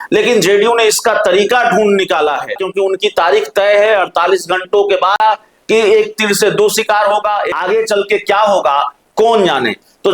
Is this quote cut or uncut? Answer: cut